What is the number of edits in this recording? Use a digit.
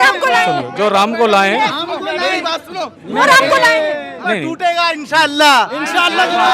1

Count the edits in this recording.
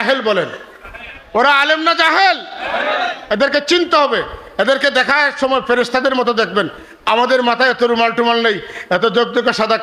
0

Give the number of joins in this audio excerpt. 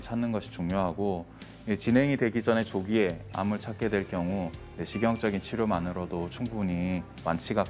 0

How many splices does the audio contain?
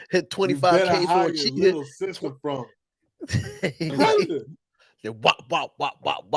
1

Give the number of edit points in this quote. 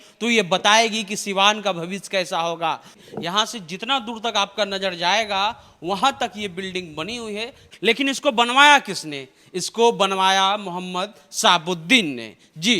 2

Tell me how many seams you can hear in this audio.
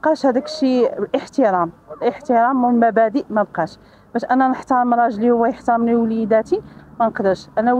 0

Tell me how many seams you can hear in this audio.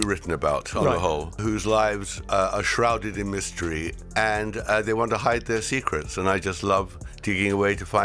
0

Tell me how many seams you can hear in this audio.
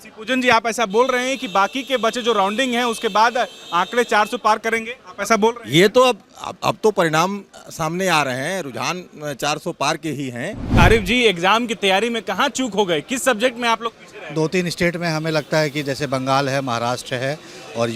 1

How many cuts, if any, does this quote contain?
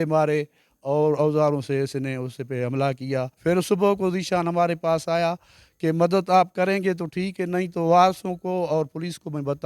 1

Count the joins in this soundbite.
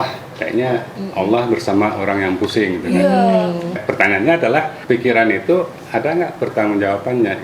3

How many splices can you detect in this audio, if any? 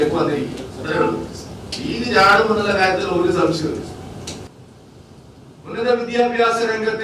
1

